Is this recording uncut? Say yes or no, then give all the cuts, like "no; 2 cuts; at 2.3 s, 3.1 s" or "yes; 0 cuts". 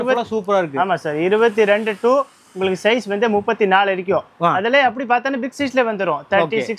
yes; 0 cuts